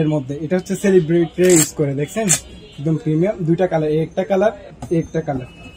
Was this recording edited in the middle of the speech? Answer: no; 0 cuts

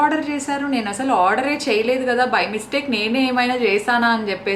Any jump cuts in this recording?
no; 0 cuts

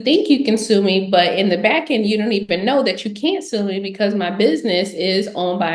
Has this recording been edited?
no; 0 cuts

